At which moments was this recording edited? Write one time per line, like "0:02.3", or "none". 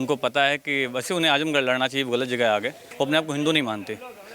0:02.8